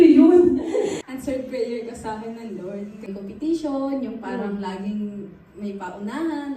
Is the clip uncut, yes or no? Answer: no